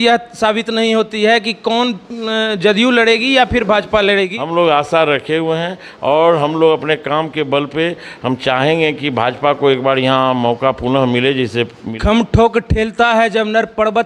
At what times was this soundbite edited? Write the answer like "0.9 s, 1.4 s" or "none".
4.4 s, 11.8 s